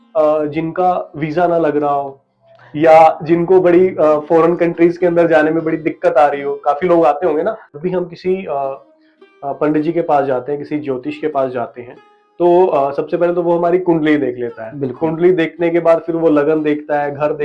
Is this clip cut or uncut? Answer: cut